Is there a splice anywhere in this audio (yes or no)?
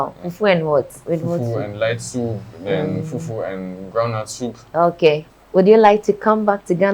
yes